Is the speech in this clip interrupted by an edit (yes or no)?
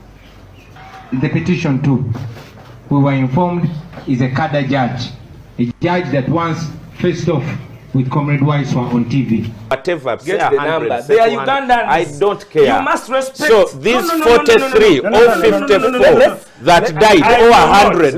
yes